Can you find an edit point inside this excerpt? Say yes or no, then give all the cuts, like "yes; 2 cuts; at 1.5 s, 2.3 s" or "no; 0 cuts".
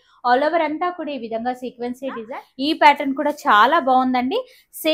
yes; 1 cut; at 2.4 s